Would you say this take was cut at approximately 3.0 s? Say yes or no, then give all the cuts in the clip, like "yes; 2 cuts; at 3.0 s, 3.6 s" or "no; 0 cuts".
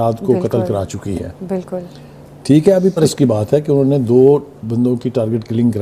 yes; 1 cut; at 3.0 s